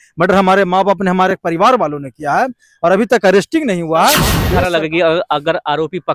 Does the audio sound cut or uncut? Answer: cut